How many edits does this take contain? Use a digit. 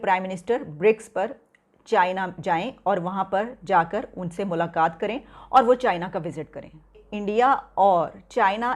1